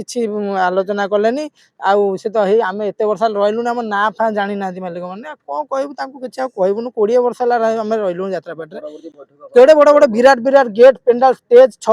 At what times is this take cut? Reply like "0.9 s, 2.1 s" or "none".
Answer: none